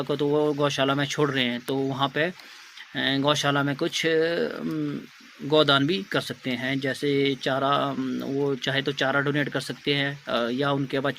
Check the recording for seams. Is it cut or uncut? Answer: uncut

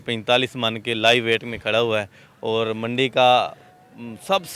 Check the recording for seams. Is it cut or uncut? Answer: uncut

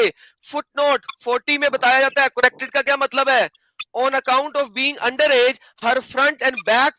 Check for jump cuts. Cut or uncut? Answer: uncut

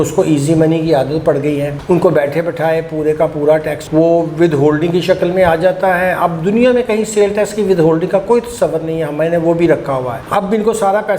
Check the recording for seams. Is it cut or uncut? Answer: uncut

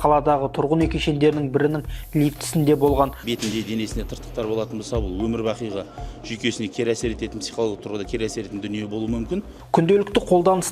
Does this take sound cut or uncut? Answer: cut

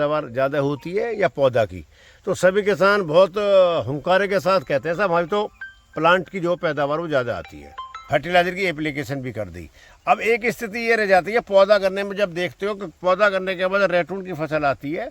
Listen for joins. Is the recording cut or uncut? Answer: cut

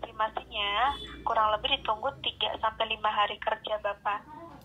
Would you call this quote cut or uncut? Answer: uncut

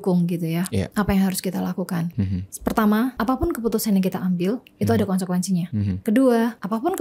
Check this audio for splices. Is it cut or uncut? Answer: uncut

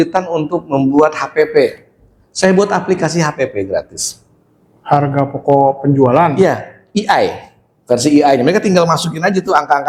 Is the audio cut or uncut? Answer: uncut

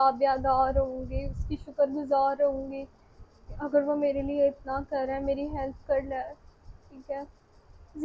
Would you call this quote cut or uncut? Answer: uncut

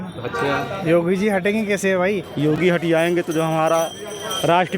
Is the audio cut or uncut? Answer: cut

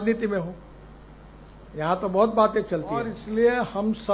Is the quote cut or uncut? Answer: cut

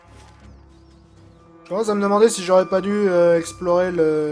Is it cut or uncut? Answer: cut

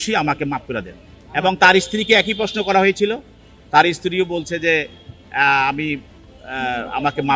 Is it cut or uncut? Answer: uncut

